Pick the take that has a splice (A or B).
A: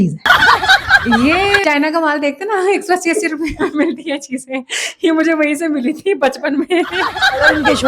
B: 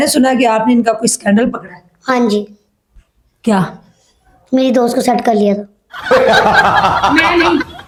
A